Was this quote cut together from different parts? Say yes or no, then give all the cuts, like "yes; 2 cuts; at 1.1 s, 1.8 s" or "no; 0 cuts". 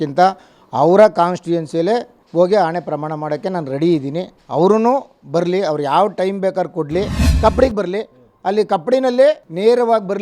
yes; 3 cuts; at 2.2 s, 4.3 s, 7.2 s